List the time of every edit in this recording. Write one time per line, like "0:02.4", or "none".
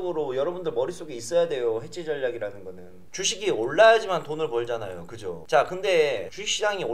0:03.1